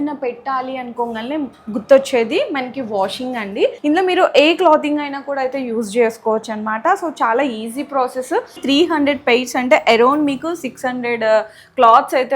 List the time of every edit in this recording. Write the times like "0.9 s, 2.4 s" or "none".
3.8 s, 8.6 s